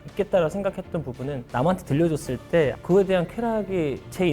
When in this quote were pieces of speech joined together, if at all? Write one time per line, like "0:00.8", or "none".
0:02.8